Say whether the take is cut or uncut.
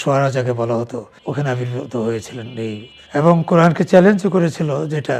cut